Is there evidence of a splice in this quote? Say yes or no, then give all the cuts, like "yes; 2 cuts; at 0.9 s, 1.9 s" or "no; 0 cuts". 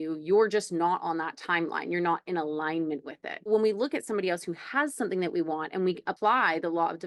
yes; 2 cuts; at 3.5 s, 6.1 s